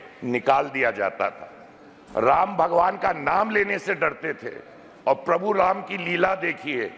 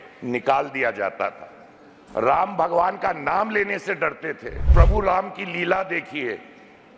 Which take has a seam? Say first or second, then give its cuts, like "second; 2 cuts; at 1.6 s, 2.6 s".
second; 1 cut; at 4.7 s